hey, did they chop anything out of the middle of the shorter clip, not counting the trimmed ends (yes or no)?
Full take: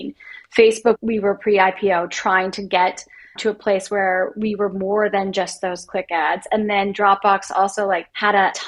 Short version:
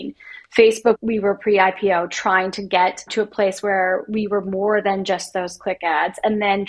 yes